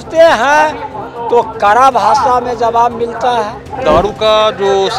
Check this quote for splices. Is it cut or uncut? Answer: cut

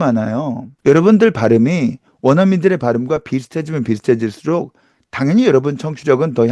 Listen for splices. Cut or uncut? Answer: uncut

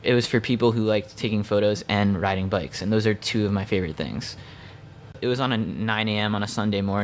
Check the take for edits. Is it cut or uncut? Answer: cut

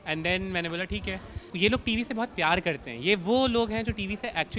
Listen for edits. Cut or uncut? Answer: cut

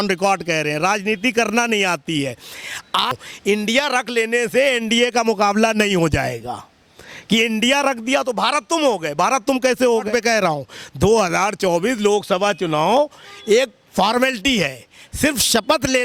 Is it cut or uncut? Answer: cut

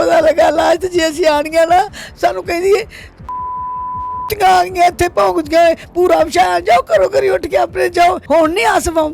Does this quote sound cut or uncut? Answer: cut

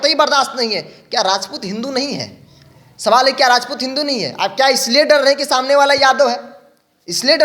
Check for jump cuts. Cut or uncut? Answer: uncut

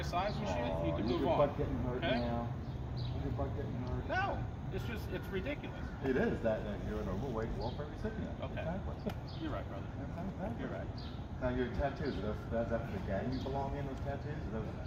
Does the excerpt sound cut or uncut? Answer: uncut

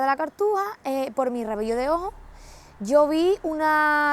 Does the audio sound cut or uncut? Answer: uncut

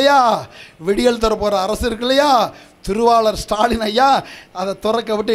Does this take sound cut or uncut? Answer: uncut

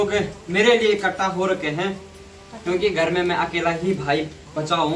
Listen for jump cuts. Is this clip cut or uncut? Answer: uncut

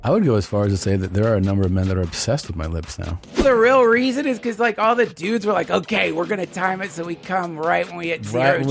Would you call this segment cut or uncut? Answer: cut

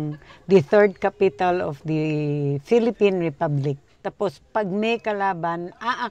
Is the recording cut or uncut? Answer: cut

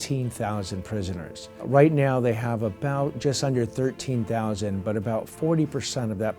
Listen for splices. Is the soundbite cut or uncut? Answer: cut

